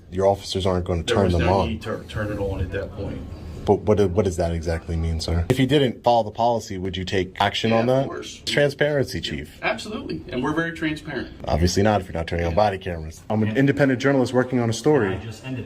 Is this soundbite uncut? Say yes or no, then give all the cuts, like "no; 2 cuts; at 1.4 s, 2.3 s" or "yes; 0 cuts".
no; 5 cuts; at 5.6 s, 7.4 s, 8.5 s, 11.3 s, 13.3 s